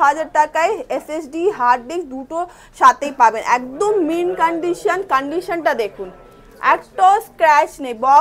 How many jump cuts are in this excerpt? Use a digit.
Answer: 0